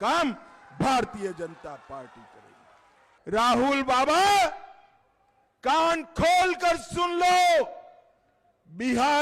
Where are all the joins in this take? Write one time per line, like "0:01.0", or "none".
0:03.0